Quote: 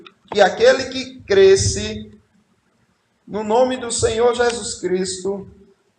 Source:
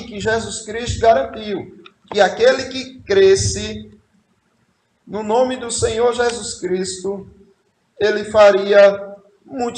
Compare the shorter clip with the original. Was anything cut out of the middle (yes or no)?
no